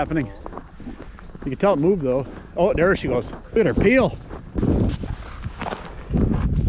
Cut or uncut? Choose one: cut